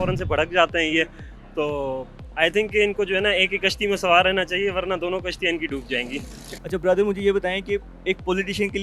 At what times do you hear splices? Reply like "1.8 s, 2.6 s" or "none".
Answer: none